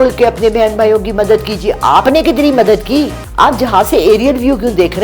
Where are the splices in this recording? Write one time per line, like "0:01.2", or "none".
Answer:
0:03.2